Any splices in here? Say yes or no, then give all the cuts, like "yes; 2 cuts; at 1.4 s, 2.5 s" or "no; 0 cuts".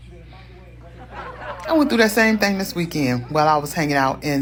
no; 0 cuts